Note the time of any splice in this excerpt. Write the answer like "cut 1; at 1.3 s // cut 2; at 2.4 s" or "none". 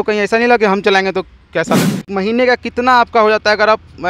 cut 1; at 2.0 s